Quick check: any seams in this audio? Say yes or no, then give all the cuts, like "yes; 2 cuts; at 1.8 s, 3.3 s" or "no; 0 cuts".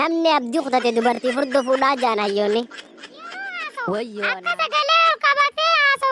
yes; 1 cut; at 4.4 s